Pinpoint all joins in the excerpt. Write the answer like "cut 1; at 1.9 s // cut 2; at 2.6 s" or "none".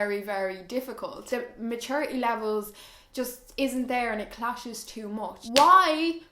cut 1; at 1.2 s // cut 2; at 5.4 s